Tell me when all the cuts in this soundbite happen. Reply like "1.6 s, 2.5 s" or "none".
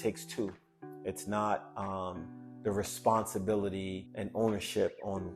4.0 s